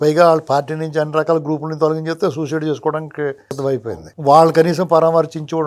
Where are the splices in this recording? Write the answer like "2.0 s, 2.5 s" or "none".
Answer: none